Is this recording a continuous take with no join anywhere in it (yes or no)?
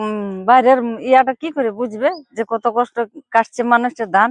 yes